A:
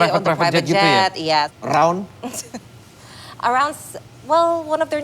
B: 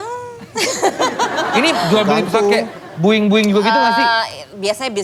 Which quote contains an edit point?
A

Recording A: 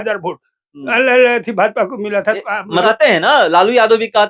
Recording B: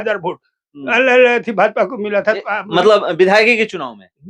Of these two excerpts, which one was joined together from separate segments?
A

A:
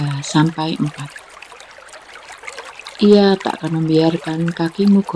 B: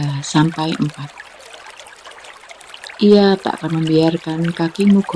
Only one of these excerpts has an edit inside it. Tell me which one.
A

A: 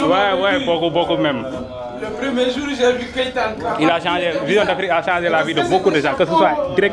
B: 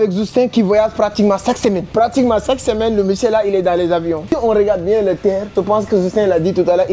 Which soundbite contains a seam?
B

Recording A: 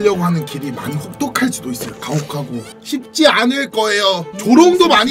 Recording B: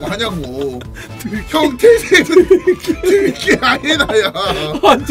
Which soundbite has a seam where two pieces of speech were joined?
A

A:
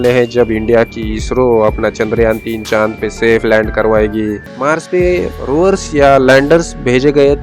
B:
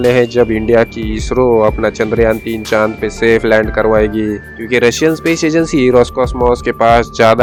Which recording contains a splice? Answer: A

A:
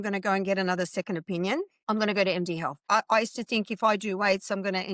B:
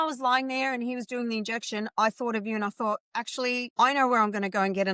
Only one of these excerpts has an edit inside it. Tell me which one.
A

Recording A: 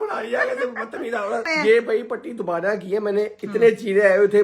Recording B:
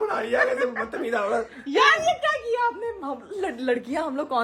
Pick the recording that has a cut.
A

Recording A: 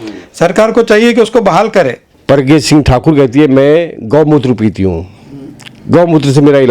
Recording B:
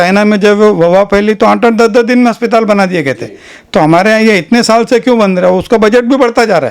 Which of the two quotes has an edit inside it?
A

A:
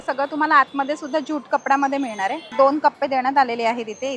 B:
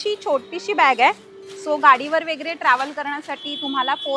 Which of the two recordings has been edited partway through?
A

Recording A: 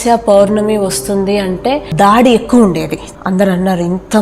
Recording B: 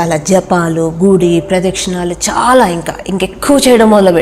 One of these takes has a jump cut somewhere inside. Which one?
A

